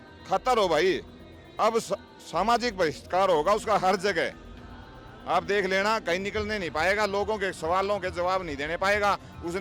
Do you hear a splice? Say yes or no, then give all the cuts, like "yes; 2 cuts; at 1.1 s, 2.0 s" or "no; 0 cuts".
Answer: no; 0 cuts